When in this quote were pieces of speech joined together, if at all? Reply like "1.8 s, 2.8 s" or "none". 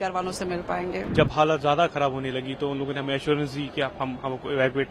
1.1 s